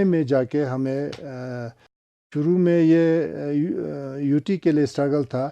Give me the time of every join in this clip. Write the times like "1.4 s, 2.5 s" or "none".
2.3 s